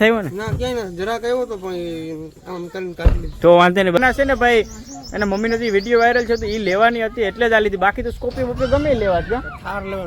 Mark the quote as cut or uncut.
cut